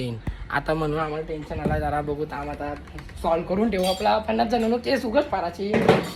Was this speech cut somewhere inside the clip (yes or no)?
no